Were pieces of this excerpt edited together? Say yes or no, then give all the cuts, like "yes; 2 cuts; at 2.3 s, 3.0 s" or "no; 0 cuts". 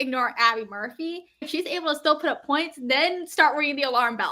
yes; 1 cut; at 1.5 s